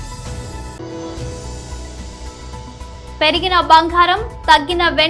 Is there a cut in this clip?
yes; 2 cuts; at 0.8 s, 3.0 s

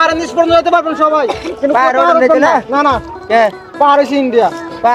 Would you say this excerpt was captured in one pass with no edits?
yes; 0 cuts

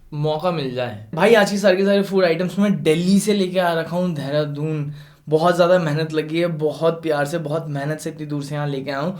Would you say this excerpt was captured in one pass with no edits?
no; 1 cut; at 1.0 s

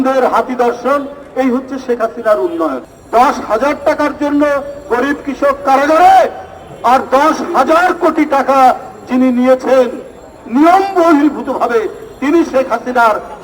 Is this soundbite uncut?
no; 1 cut; at 2.9 s

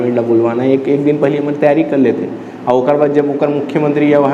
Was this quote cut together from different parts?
no; 0 cuts

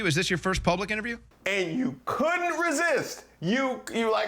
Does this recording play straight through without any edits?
no; 1 cut; at 1.3 s

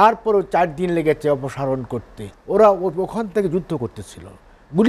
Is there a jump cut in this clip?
yes; 1 cut; at 2.3 s

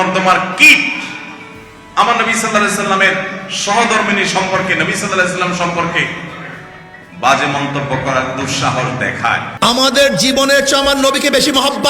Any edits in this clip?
yes; 1 cut; at 9.5 s

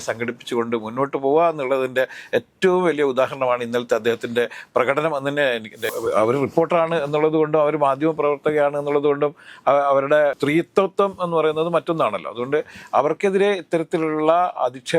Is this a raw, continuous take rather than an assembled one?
no; 2 cuts; at 5.9 s, 10.4 s

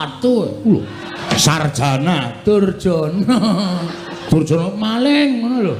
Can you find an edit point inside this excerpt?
yes; 2 cuts; at 1.2 s, 4.1 s

